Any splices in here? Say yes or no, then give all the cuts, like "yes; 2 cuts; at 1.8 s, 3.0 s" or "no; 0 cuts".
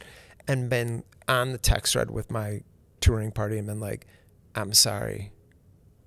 no; 0 cuts